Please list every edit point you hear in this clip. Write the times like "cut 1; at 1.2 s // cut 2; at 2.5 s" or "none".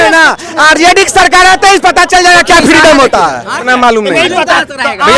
cut 1; at 3.6 s